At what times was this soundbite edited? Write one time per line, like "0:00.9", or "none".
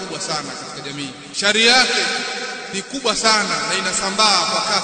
0:01.3
0:02.6

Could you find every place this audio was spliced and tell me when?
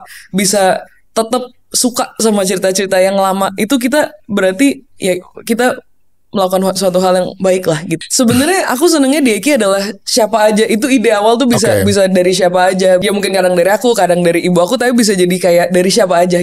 0:07.9
0:13.0

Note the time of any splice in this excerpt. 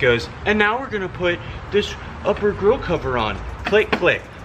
none

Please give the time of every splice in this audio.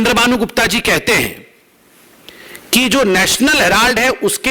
none

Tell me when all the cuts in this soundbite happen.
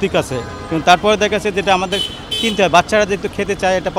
none

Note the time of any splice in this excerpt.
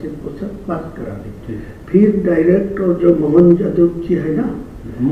none

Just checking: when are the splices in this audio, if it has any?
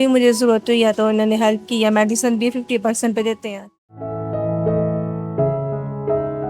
0:04.0

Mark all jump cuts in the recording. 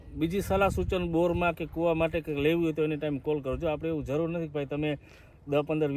none

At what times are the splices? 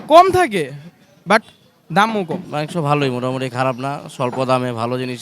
0:02.4

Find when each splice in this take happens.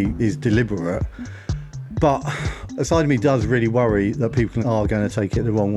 0:04.6

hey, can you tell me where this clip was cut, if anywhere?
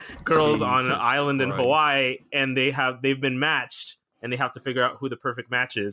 none

